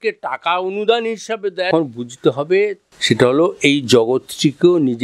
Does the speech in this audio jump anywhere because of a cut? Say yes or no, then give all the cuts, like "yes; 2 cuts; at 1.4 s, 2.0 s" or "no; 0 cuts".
yes; 2 cuts; at 1.7 s, 2.9 s